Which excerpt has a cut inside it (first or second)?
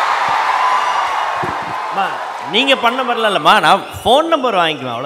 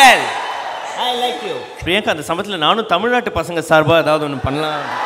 second